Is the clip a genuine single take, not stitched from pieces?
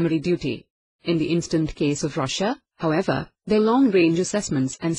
yes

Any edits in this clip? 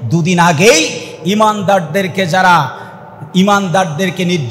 no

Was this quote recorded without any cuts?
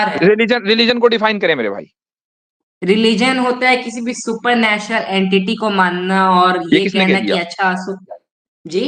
yes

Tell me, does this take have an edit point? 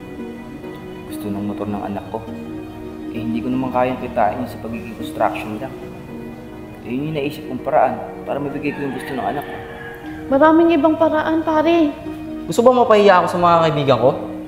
yes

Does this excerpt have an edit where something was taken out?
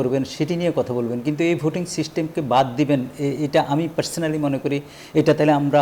no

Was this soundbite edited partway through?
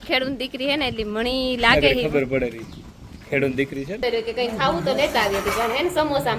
yes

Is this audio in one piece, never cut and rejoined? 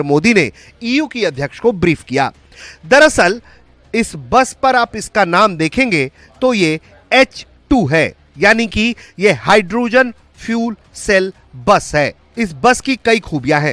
yes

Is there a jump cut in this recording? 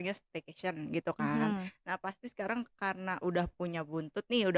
no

